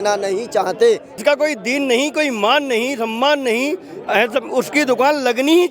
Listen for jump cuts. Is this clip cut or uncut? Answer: cut